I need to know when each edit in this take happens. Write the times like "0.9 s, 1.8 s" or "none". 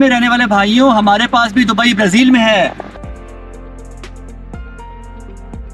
none

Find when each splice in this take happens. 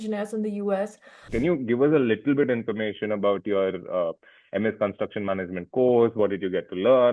1.1 s

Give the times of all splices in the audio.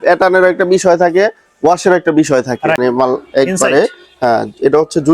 2.8 s

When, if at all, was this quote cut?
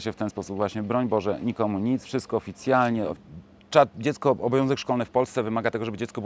3.2 s

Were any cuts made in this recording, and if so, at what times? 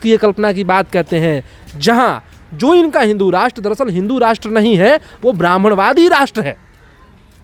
none

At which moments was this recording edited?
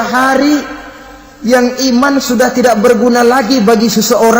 none

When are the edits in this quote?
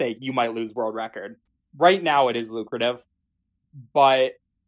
1.4 s

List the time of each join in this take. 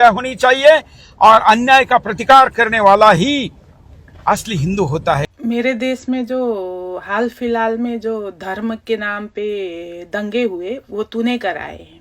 5.3 s

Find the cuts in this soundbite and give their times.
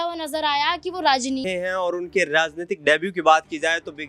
1.5 s

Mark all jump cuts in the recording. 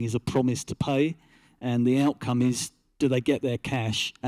none

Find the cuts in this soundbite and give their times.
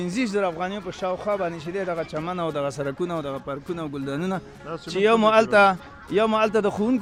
none

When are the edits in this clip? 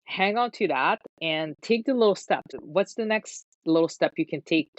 2.6 s

